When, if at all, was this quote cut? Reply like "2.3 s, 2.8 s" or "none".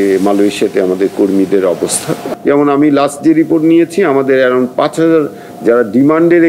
2.2 s

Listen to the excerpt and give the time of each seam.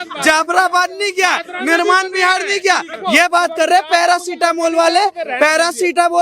2.9 s

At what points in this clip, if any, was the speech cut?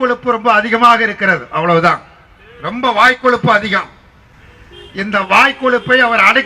none

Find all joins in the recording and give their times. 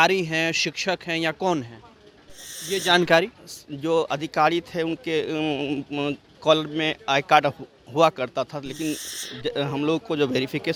none

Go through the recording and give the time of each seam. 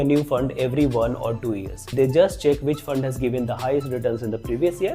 1.9 s

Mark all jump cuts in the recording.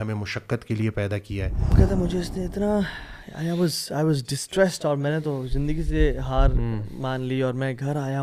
1.7 s

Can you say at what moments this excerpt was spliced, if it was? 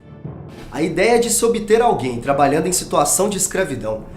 2.1 s

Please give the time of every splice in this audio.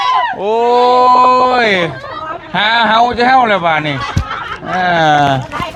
none

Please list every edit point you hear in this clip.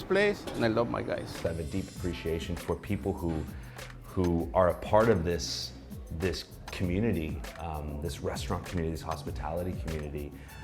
1.4 s

